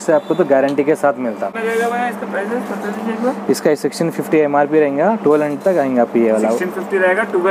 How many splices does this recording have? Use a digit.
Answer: 1